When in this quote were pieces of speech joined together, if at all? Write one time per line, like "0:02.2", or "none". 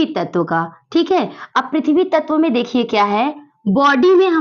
none